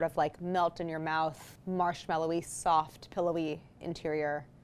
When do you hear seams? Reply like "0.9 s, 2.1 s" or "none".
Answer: 1.5 s